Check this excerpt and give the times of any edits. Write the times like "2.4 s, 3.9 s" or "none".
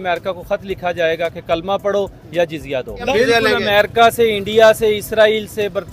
3.1 s